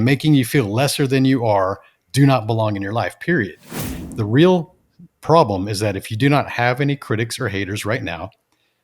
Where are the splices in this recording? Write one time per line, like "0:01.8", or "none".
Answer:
0:03.8